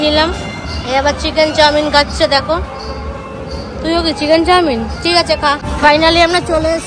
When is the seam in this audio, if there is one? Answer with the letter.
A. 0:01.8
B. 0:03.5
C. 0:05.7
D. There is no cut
C